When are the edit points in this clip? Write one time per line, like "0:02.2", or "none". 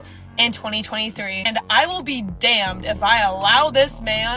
0:01.7